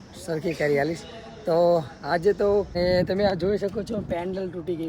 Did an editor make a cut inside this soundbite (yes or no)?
yes